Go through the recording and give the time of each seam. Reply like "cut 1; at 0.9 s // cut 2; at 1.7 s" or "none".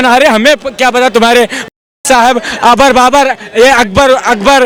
none